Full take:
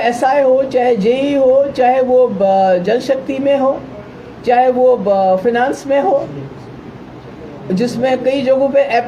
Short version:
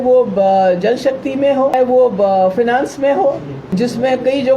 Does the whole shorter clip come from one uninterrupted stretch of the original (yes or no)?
no